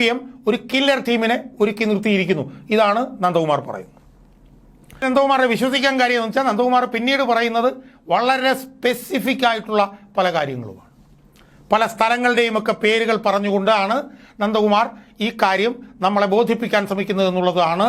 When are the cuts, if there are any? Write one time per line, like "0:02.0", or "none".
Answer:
0:05.0